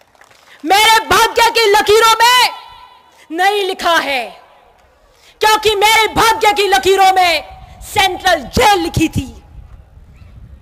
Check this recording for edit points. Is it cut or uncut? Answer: uncut